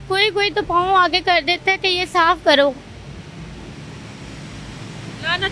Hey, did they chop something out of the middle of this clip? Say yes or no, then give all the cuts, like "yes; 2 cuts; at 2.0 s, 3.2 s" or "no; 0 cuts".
no; 0 cuts